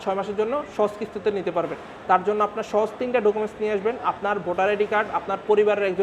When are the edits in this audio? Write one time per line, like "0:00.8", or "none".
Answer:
none